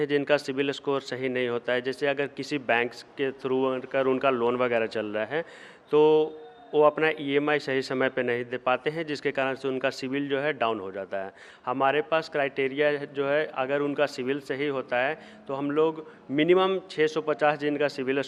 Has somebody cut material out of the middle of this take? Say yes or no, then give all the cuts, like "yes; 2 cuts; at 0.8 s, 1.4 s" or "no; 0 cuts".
no; 0 cuts